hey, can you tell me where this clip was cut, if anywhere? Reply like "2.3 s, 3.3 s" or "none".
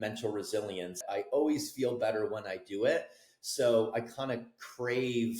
1.1 s